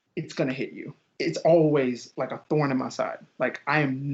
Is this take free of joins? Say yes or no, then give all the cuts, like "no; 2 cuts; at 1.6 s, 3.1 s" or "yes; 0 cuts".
no; 1 cut; at 1.0 s